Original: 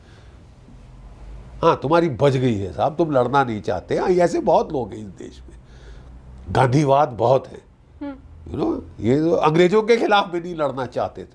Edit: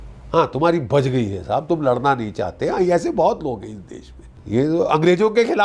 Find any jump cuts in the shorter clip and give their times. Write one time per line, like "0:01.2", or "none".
0:04.4